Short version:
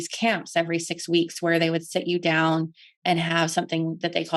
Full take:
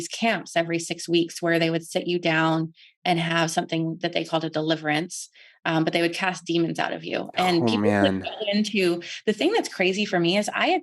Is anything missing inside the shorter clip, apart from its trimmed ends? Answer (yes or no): no